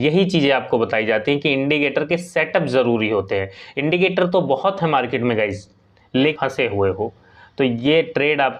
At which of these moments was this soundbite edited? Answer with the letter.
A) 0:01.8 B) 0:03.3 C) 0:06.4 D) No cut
C